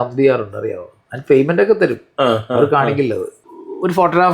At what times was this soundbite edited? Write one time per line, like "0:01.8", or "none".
0:03.4

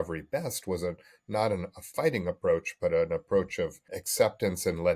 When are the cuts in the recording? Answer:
none

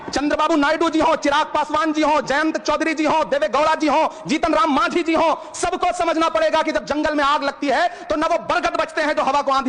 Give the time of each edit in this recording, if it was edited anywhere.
none

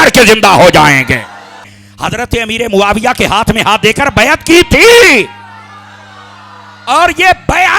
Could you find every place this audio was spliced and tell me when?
0:01.8

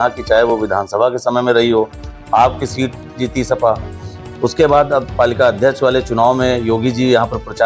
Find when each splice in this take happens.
none

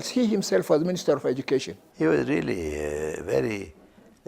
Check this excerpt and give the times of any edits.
0:01.8

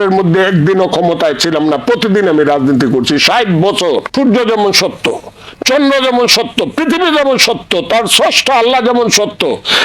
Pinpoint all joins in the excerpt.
0:04.1

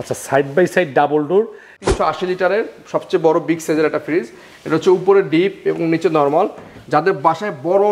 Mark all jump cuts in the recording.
0:01.8

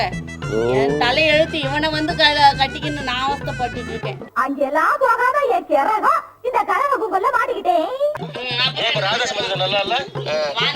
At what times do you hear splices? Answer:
0:08.2

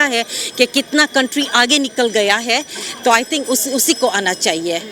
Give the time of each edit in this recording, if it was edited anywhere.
none

